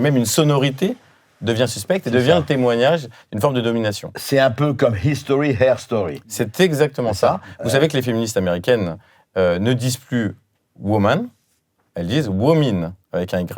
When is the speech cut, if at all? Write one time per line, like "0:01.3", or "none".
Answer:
none